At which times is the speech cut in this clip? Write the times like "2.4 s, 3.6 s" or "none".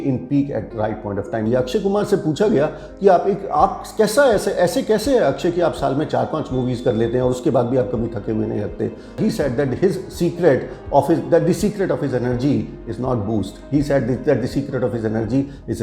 1.5 s, 9.2 s